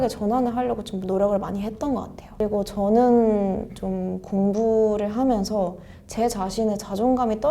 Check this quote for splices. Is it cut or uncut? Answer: cut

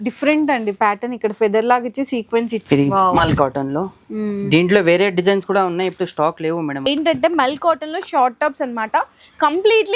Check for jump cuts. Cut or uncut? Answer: cut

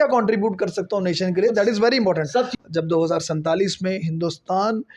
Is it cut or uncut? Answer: cut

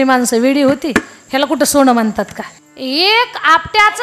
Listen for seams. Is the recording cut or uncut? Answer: cut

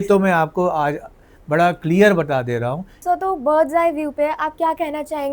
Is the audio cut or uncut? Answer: cut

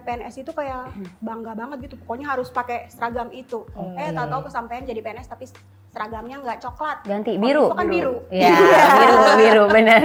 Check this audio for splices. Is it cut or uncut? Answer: uncut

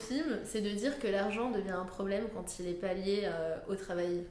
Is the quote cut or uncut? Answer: uncut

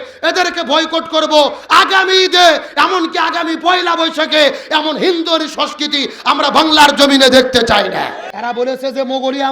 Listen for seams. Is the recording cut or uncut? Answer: cut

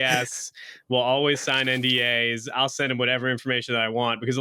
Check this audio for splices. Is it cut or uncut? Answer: uncut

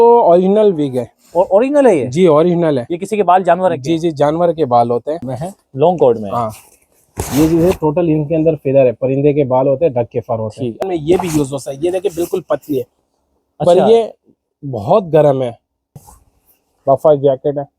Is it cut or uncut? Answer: cut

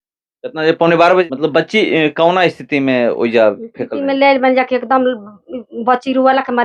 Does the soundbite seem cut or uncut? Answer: cut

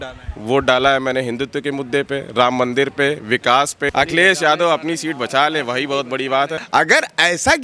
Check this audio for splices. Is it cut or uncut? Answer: cut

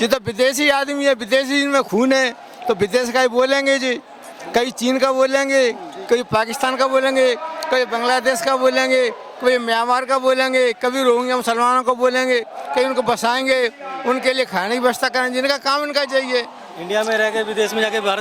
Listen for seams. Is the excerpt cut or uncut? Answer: uncut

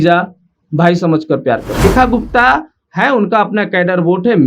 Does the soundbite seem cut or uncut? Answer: cut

